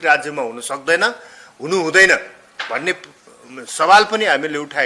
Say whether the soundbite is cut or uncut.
uncut